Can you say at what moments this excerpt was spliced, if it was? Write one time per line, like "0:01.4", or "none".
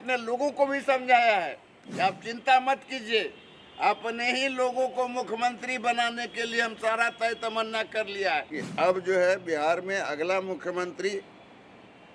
0:08.6